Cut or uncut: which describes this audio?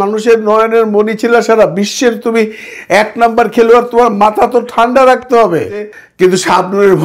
cut